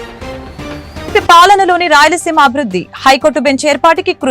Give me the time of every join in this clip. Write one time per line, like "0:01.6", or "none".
0:01.1